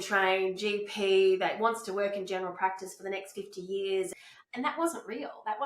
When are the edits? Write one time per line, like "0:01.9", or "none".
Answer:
0:04.1